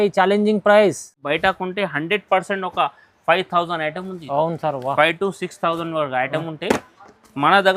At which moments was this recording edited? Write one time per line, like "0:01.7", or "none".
0:01.2